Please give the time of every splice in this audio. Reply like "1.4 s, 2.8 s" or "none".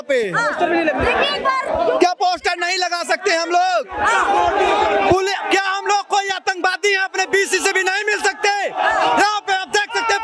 none